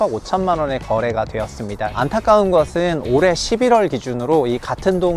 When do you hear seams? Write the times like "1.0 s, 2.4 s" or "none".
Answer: 1.9 s